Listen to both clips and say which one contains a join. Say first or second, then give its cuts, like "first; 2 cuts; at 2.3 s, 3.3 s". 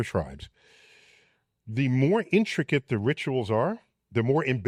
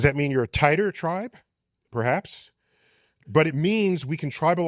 second; 1 cut; at 1.8 s